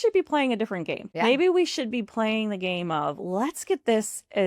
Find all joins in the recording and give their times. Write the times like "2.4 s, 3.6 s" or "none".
1.0 s